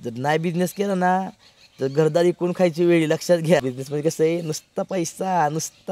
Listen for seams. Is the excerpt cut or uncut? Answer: cut